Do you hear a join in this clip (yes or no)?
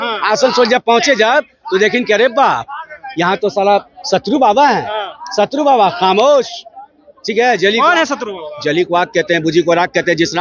no